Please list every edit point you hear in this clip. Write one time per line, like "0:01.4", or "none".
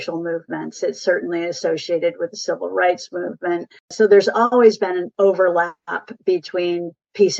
0:03.9
0:05.1